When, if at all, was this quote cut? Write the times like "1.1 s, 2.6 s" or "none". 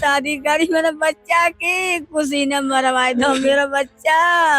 none